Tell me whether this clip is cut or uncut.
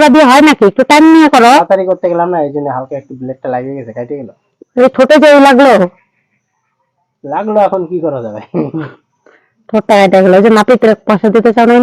cut